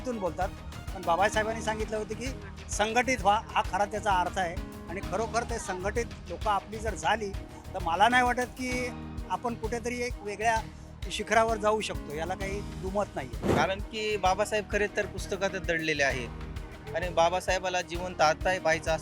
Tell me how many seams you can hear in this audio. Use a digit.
1